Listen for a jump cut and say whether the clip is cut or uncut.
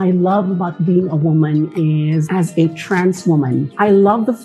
uncut